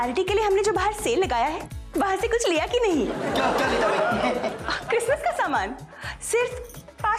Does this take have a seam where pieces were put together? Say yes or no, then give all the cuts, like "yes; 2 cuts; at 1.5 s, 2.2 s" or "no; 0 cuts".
no; 0 cuts